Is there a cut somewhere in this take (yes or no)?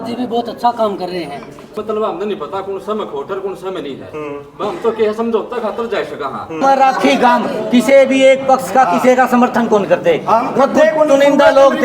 yes